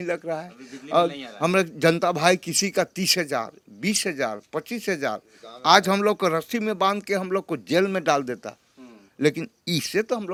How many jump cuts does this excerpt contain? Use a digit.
0